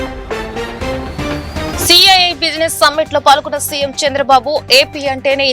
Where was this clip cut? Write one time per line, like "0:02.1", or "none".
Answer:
0:01.7